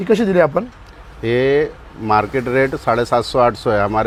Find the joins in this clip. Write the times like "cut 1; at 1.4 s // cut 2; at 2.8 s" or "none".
none